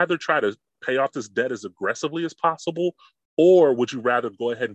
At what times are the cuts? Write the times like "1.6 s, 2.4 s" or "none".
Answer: none